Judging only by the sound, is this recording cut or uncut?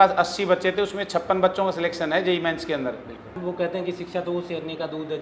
cut